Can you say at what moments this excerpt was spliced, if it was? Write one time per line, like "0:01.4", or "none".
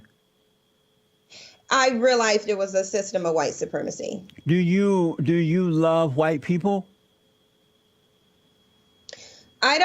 0:04.3